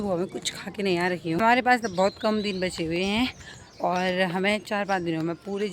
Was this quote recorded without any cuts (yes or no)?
no